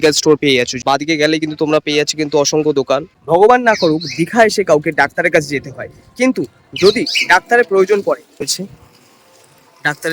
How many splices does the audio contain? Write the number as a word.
two